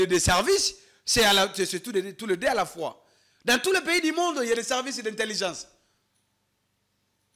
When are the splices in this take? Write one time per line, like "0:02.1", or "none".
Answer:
none

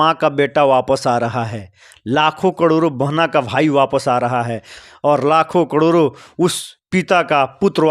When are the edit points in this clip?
0:04.8

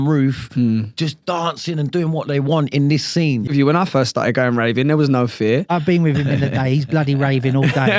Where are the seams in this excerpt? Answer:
0:03.5
0:05.7

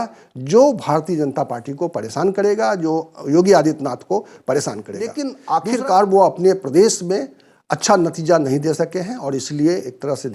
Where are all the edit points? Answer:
0:05.3

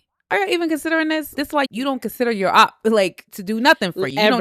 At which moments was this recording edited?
0:01.4
0:03.3

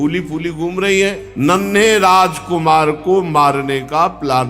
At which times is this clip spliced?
0:01.2

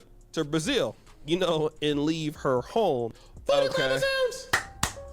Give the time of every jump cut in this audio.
0:03.1

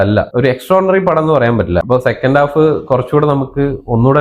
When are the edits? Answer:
0:01.8

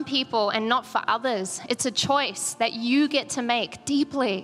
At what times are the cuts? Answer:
none

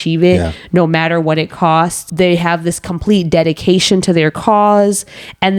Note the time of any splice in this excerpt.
none

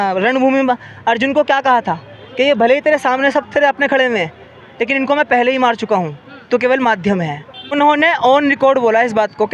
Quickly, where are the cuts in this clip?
0:07.7

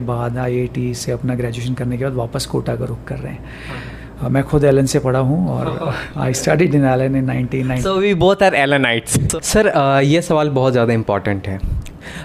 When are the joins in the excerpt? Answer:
0:09.2

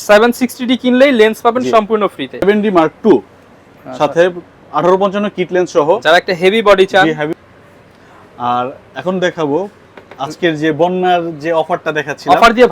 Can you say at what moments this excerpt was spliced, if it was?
0:02.4
0:07.3

